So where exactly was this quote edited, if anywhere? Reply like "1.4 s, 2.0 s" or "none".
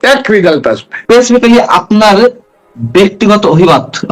0.9 s